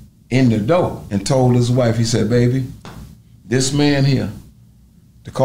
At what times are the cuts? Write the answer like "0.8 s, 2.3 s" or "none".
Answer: 1.1 s

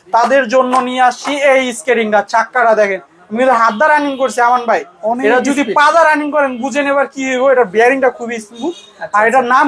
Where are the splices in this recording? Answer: none

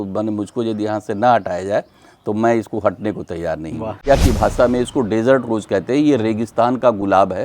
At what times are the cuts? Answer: 4.1 s

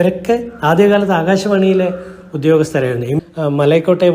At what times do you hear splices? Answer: 3.1 s

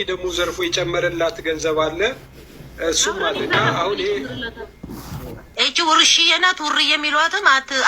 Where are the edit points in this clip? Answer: 5.4 s

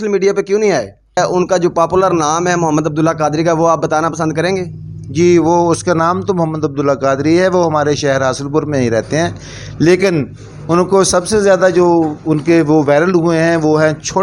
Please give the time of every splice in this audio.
1.2 s

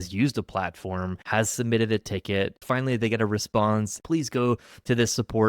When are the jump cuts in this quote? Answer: 1.2 s, 2.6 s, 4.0 s

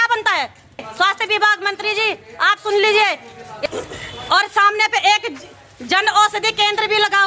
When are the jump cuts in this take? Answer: 0.9 s, 3.5 s

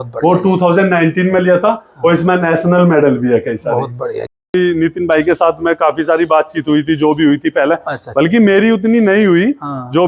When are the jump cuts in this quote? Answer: 4.5 s

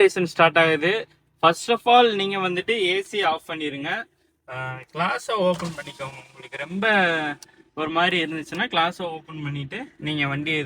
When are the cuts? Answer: none

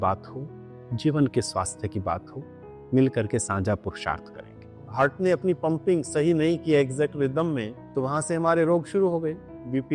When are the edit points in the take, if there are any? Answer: 4.8 s

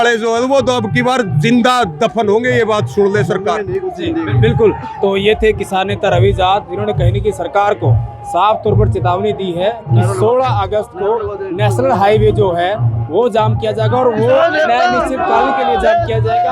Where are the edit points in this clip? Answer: none

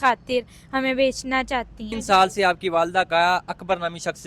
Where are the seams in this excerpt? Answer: 1.9 s

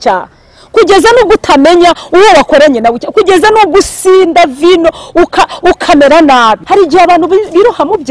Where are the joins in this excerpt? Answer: 6.6 s

